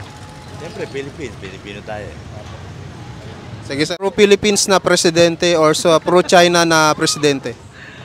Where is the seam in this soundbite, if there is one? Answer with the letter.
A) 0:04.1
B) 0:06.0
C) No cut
A